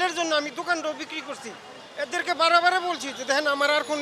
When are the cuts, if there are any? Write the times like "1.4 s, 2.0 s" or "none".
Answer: none